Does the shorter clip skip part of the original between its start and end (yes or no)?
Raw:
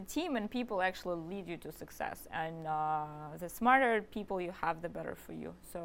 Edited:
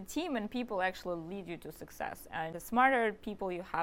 yes